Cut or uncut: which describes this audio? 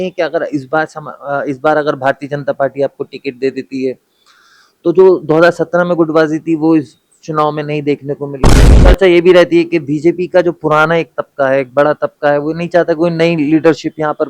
cut